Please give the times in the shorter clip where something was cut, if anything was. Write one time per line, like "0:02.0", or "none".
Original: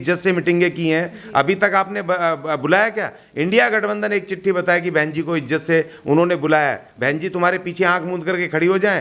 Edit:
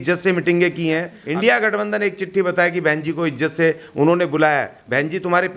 0:01.2